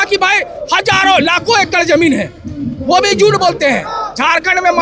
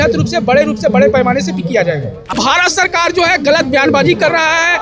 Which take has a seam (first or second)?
second